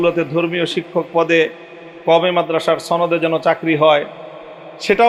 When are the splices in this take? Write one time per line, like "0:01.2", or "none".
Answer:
none